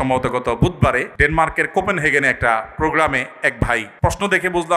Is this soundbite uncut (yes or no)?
no